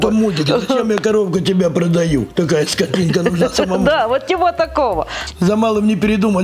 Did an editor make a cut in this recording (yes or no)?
yes